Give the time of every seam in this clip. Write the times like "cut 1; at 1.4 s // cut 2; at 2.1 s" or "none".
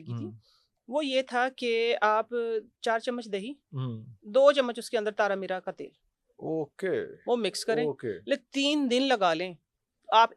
none